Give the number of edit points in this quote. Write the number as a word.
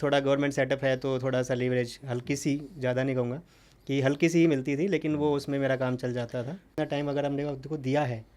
one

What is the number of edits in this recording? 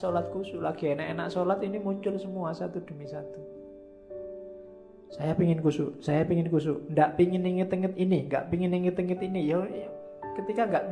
two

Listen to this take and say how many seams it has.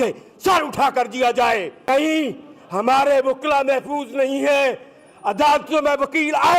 one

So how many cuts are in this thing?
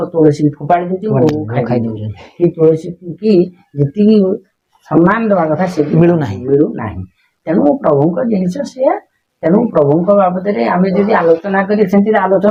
zero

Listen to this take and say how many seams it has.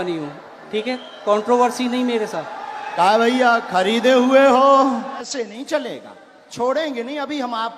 one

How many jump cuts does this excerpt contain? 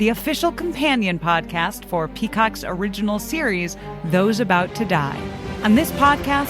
one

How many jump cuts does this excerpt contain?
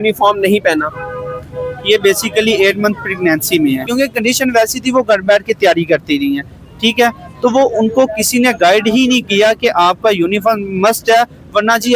one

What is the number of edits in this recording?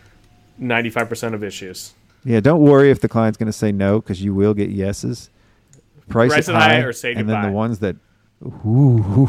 zero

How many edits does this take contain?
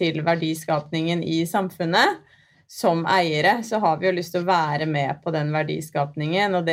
one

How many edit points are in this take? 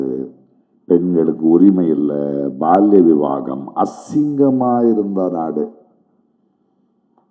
zero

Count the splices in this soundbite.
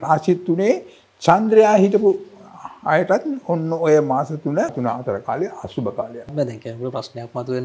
two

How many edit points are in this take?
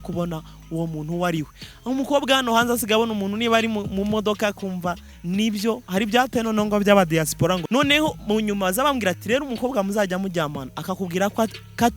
one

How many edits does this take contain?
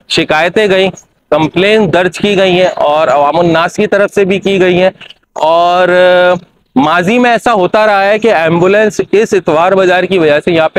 zero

